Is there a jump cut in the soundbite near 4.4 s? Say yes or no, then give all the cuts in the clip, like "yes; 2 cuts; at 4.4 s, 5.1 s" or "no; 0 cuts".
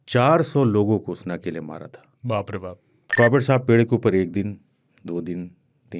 no; 1 cut; at 3.0 s